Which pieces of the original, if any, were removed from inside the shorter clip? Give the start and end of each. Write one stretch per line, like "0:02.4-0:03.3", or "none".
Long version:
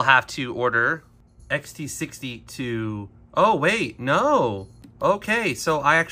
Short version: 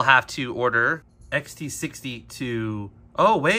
0:01.1-0:01.3